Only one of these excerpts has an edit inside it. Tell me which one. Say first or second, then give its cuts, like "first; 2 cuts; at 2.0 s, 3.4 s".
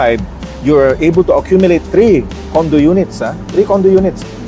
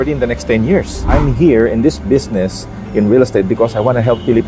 second; 1 cut; at 1.1 s